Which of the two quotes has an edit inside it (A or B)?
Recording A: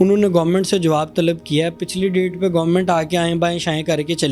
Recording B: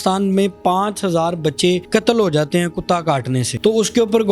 B